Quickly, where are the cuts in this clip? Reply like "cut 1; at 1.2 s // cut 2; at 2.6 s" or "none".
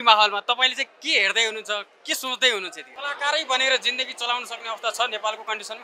cut 1; at 2.9 s